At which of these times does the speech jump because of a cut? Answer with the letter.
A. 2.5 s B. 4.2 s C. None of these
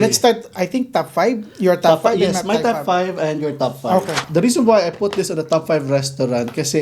B